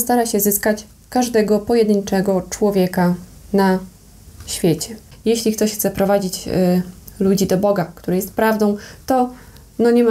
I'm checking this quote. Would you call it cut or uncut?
cut